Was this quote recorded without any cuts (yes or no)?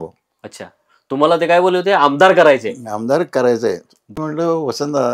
no